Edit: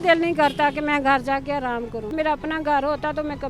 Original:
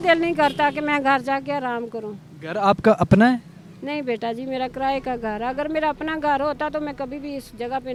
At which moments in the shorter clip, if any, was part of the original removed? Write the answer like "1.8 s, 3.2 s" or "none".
2.1 s